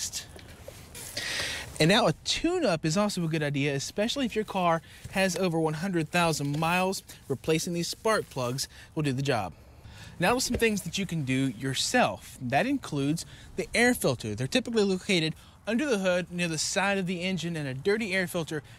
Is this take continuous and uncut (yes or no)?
no